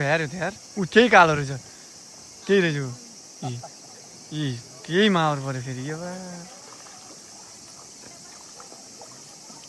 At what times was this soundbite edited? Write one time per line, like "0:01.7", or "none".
none